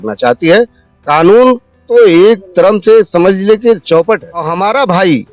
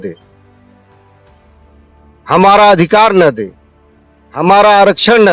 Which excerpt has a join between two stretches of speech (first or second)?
first